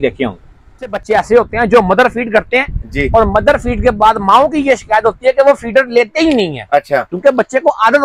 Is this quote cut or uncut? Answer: cut